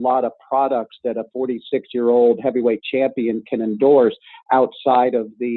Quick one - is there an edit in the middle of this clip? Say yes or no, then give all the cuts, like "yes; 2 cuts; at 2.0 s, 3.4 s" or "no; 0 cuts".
no; 0 cuts